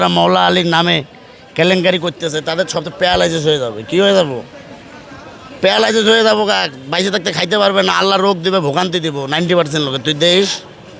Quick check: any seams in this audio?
no; 0 cuts

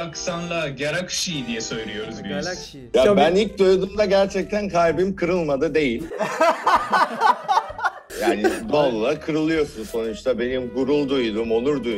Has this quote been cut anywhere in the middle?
yes; 1 cut; at 2.8 s

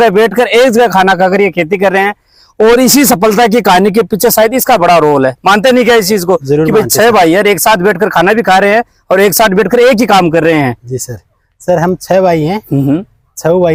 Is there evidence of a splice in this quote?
no; 0 cuts

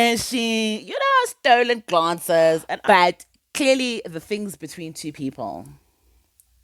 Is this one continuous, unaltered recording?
no; 1 cut; at 2.7 s

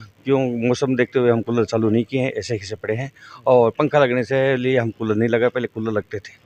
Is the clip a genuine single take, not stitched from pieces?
yes; 0 cuts

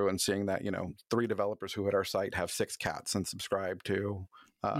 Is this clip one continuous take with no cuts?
yes; 0 cuts

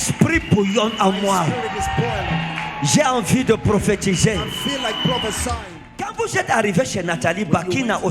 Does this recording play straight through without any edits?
no; 1 cut; at 6.1 s

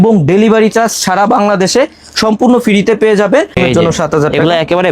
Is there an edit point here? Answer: yes; 1 cut; at 3.5 s

